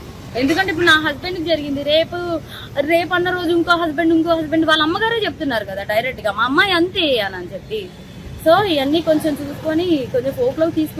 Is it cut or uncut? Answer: uncut